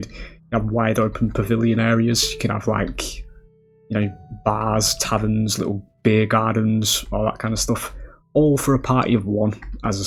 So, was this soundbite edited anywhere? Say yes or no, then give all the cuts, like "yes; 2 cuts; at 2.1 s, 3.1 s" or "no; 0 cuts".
no; 0 cuts